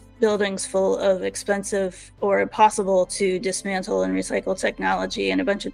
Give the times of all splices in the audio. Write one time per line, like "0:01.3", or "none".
none